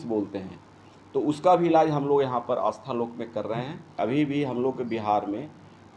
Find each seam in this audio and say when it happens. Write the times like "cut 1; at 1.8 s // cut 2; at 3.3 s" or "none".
cut 1; at 4.0 s

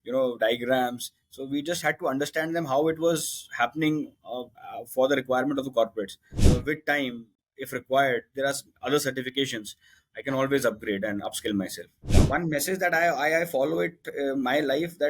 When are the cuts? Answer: cut 1; at 6.4 s // cut 2; at 12.1 s

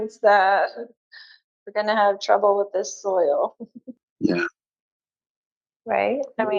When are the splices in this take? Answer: cut 1; at 4.0 s

